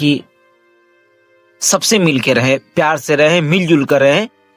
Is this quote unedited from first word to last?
yes; 0 cuts

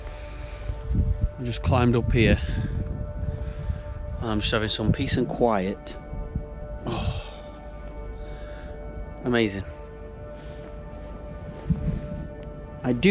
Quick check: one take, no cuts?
no; 1 cut; at 6.7 s

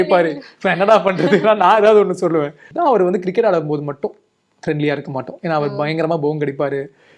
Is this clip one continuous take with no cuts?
no; 1 cut; at 2.6 s

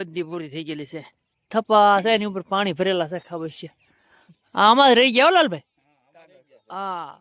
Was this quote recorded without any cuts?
no; 1 cut; at 1.5 s

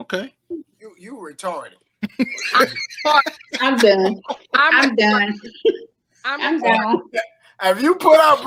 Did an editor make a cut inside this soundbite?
no; 0 cuts

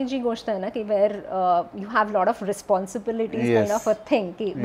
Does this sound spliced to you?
no; 0 cuts

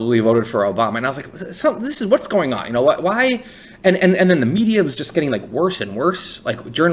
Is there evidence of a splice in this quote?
no; 0 cuts

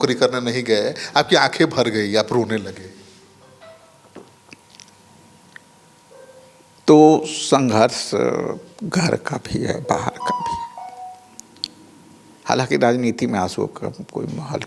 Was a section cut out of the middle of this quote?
no; 0 cuts

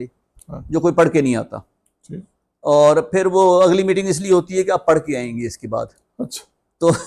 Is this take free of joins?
yes; 0 cuts

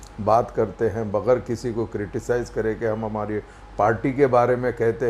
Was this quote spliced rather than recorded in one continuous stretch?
no; 0 cuts

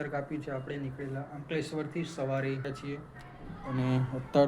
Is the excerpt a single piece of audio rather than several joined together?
no; 1 cut; at 2.7 s

